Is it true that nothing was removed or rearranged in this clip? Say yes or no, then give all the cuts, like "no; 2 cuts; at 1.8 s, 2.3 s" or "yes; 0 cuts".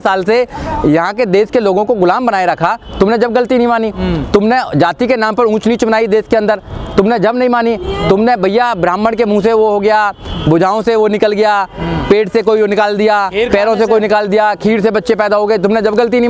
yes; 0 cuts